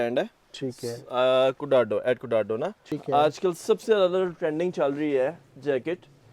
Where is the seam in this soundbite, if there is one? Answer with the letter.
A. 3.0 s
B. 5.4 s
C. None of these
A